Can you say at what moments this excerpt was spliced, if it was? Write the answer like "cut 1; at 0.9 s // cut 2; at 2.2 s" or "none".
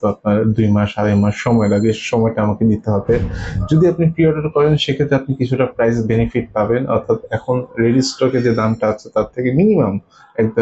none